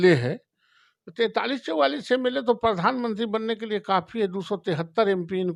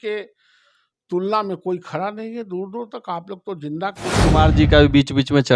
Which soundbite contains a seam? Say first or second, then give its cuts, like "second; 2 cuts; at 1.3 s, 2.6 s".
second; 1 cut; at 4.2 s